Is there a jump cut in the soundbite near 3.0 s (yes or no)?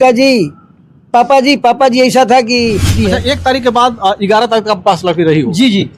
yes